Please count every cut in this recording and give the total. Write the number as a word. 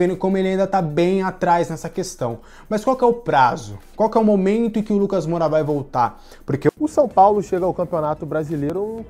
one